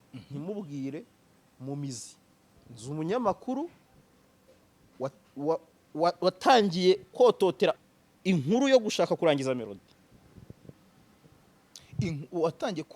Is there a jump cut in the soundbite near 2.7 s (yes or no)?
yes